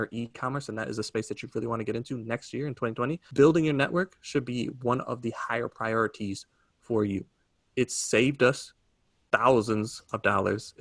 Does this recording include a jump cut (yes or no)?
yes